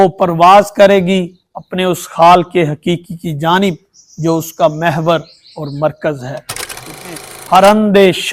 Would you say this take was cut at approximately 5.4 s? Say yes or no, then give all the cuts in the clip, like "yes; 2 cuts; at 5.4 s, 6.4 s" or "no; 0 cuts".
no; 1 cut; at 7.0 s